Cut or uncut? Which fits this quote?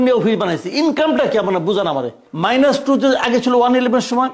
cut